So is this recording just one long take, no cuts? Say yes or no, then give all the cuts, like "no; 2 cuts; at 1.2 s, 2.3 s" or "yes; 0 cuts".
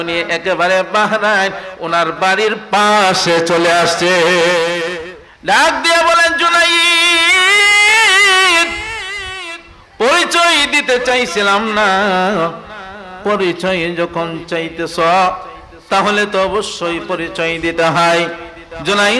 no; 1 cut; at 4.9 s